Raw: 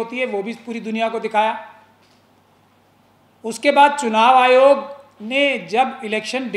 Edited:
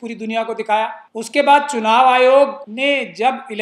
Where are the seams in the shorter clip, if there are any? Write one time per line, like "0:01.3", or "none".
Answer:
0:01.0
0:02.6